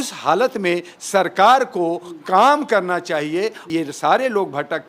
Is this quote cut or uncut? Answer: cut